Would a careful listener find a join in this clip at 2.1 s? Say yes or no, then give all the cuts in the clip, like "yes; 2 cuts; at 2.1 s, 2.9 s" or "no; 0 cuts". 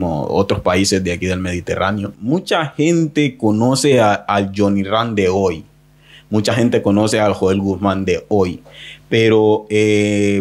yes; 1 cut; at 2.1 s